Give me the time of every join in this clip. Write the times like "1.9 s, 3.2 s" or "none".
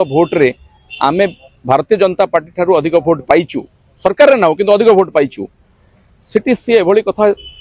none